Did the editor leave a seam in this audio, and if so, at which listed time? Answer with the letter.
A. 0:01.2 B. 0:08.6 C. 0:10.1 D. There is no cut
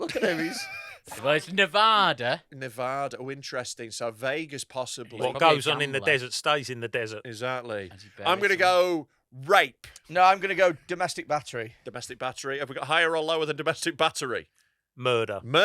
A